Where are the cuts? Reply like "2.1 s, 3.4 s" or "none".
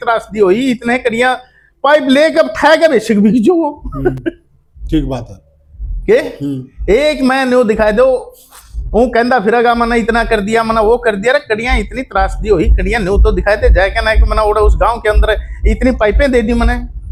none